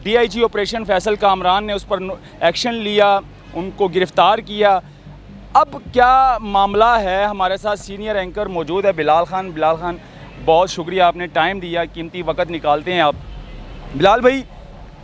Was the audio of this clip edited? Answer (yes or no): no